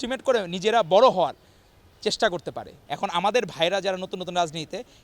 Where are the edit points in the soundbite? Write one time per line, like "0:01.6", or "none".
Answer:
0:02.7